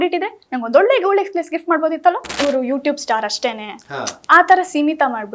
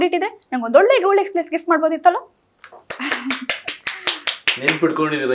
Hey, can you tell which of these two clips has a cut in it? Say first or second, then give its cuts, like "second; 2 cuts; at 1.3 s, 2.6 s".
first; 1 cut; at 2.4 s